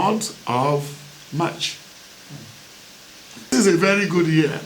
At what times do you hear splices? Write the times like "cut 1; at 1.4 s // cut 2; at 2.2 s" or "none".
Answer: cut 1; at 3.5 s